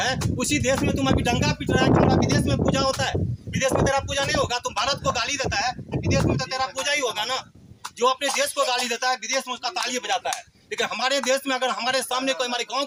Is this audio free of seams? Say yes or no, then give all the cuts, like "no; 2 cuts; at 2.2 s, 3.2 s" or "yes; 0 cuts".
yes; 0 cuts